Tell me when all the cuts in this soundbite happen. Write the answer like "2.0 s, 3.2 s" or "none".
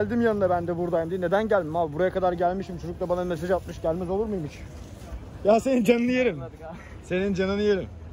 none